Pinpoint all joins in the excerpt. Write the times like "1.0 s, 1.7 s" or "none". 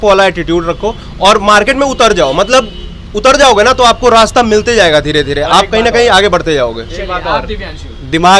none